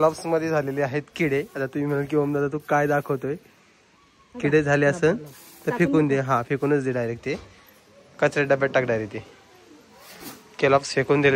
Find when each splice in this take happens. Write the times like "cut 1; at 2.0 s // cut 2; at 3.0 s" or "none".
none